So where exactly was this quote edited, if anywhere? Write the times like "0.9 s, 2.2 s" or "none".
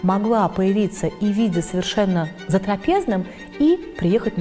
none